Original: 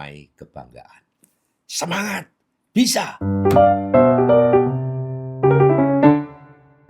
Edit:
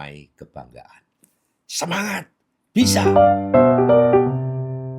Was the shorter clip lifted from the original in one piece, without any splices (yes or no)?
no